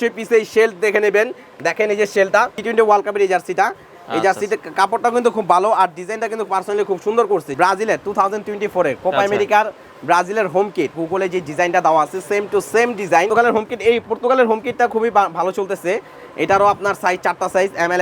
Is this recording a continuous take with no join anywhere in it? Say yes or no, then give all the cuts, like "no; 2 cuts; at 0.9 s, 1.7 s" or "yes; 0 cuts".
no; 4 cuts; at 2.6 s, 7.5 s, 11.0 s, 13.3 s